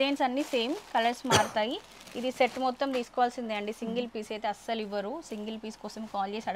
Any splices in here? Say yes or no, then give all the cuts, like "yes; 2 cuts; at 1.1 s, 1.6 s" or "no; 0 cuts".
no; 0 cuts